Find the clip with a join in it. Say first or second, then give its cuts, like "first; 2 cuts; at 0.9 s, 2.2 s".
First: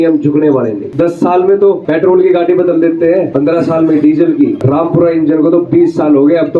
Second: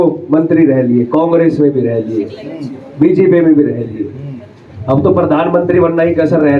first; 4 cuts; at 0.8 s, 1.8 s, 3.3 s, 4.6 s